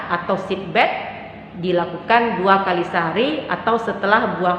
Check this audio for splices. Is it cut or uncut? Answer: uncut